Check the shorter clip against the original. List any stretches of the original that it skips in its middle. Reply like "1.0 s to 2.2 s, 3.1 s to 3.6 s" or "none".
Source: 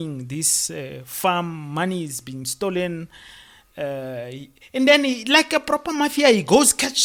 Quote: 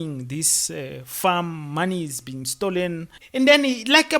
3.2 s to 4.6 s